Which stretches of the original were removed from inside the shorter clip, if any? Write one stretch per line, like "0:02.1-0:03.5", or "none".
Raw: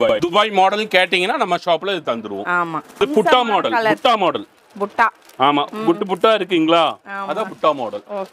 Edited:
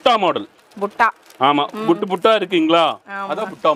none